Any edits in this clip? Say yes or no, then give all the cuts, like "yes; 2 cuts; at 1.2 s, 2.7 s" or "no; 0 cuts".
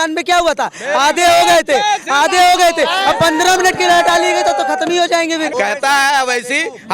yes; 1 cut; at 5.5 s